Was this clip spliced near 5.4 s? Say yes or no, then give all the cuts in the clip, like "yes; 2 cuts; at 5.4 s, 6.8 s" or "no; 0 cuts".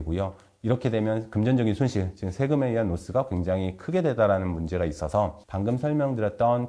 yes; 1 cut; at 5.4 s